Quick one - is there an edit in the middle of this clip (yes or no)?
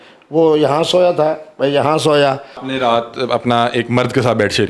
yes